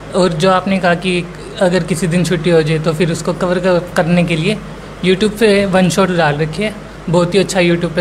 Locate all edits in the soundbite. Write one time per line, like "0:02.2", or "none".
none